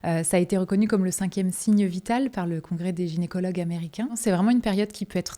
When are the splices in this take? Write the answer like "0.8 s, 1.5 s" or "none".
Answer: 4.2 s